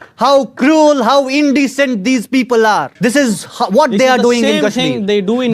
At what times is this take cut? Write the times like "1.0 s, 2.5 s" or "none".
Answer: 2.9 s